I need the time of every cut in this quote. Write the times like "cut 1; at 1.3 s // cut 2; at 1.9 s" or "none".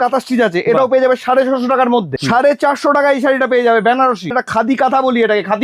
cut 1; at 2.1 s // cut 2; at 4.4 s